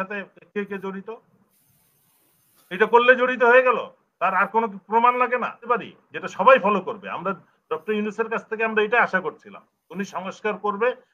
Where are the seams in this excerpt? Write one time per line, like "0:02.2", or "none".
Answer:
0:05.6

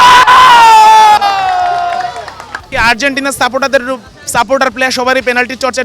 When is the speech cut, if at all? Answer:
0:02.6

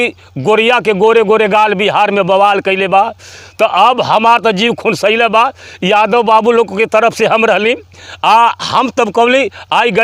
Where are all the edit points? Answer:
none

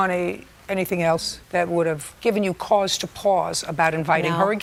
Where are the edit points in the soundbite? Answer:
none

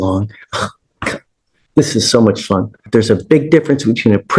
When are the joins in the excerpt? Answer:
0:02.9

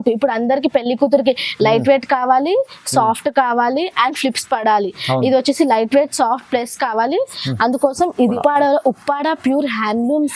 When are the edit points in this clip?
0:08.4

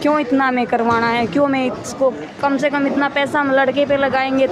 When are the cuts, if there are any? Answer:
none

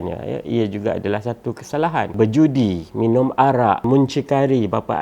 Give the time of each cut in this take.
0:02.1
0:03.8

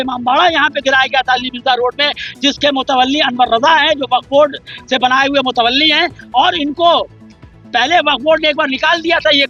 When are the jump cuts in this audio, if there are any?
none

